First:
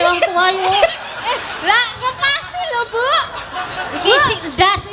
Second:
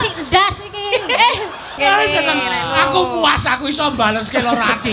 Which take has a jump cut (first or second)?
second